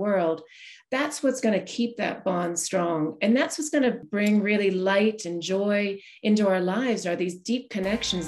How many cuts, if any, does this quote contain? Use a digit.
1